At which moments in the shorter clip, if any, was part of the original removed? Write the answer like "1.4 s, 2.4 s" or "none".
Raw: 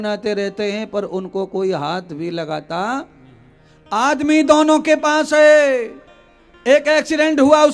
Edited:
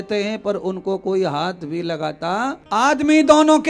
2.6 s